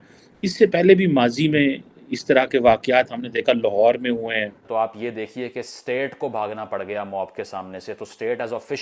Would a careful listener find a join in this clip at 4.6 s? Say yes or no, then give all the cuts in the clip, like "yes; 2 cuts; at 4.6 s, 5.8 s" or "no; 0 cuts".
yes; 1 cut; at 4.6 s